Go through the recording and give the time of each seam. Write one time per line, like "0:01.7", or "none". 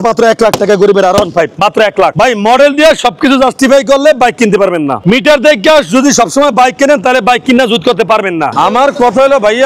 0:02.1
0:08.5